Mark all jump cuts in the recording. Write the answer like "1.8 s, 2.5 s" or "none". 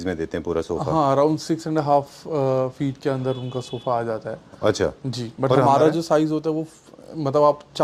none